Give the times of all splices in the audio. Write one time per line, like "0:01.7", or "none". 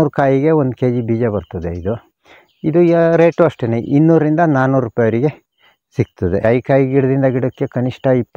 0:06.4